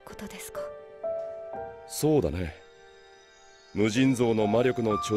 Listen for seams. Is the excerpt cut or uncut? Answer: uncut